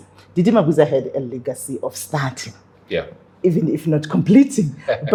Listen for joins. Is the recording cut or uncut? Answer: uncut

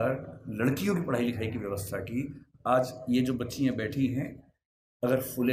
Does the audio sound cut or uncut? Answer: uncut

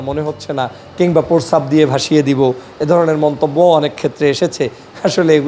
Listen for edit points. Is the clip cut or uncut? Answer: uncut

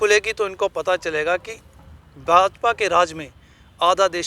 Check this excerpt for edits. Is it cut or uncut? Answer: uncut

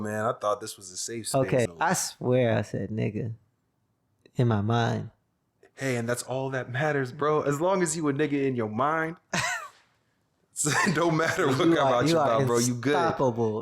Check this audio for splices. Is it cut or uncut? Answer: cut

